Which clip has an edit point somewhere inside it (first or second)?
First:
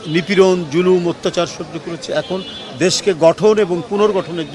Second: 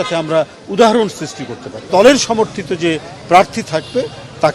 second